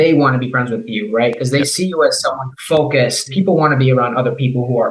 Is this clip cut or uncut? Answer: cut